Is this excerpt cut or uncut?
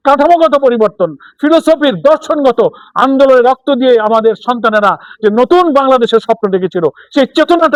uncut